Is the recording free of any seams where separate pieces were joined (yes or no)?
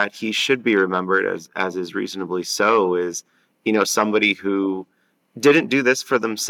yes